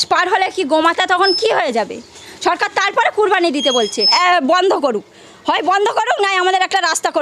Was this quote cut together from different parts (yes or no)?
yes